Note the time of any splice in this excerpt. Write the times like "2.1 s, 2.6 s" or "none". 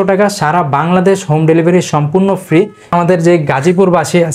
2.9 s